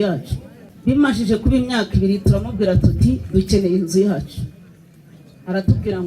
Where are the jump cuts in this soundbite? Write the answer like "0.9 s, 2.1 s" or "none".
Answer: 0.9 s